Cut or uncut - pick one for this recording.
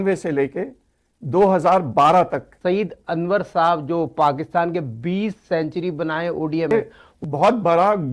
cut